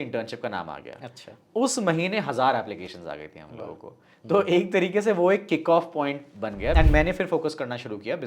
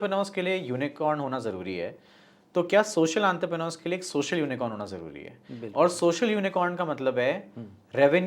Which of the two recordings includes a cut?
first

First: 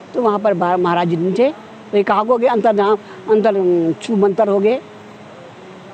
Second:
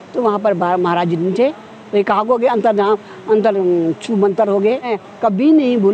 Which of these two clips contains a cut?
second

